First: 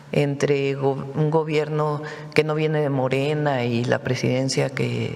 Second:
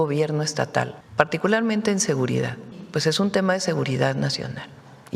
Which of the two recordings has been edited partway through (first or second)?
second